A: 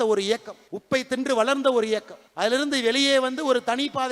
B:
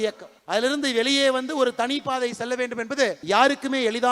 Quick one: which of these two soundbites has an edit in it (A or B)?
B